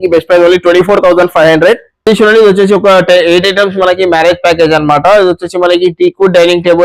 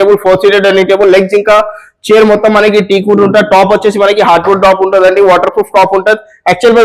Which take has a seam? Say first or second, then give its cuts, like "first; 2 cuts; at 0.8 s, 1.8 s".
first; 1 cut; at 2.1 s